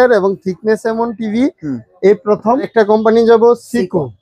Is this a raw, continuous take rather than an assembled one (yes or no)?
no